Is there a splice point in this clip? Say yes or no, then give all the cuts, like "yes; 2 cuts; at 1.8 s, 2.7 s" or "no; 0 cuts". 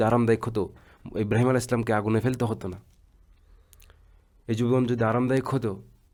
no; 0 cuts